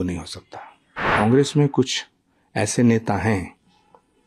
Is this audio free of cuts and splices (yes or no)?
no